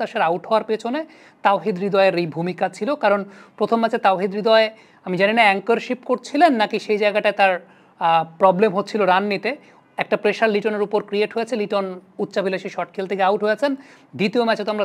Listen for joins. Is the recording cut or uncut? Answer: uncut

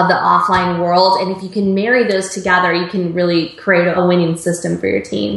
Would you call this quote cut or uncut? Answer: cut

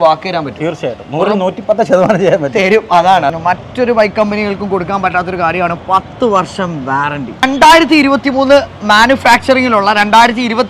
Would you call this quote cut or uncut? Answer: cut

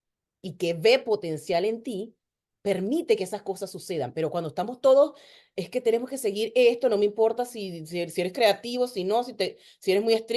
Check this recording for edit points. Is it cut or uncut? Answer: uncut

